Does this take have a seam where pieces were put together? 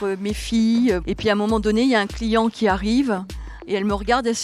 yes; 1 cut; at 1.0 s

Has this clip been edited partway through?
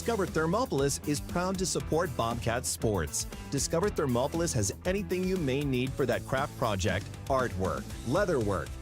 yes; 1 cut; at 1.0 s

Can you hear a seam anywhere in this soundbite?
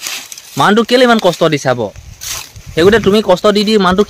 no; 0 cuts

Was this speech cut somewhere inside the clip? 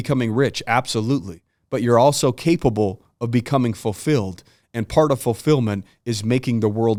no; 0 cuts

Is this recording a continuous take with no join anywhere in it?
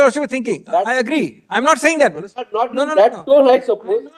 yes; 0 cuts

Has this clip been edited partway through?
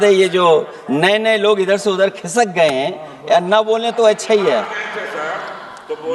no; 0 cuts

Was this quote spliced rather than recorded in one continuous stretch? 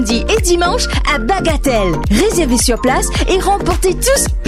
no; 0 cuts

